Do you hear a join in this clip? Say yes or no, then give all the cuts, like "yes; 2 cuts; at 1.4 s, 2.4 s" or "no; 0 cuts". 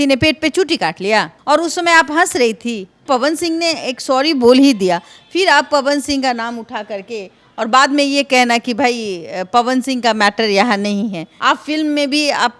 yes; 3 cuts; at 1.3 s, 3.0 s, 11.3 s